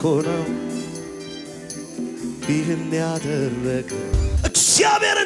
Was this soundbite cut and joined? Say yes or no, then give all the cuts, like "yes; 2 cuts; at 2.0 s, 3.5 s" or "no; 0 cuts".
yes; 1 cut; at 4.3 s